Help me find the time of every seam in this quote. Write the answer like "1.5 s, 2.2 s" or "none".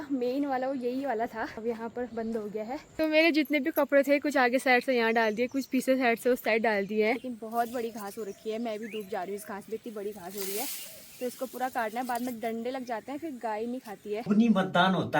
1.6 s, 2.9 s, 7.3 s, 14.3 s